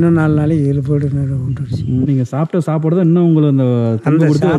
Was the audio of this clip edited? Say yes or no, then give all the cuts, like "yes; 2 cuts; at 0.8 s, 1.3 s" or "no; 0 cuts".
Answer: yes; 1 cut; at 2.1 s